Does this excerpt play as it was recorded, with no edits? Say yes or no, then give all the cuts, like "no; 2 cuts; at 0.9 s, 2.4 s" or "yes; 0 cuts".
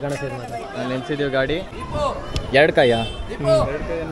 yes; 0 cuts